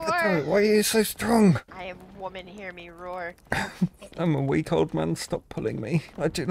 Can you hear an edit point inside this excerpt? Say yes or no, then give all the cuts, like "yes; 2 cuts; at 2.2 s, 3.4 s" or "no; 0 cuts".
no; 0 cuts